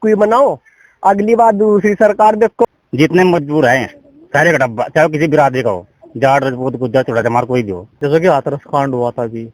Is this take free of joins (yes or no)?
no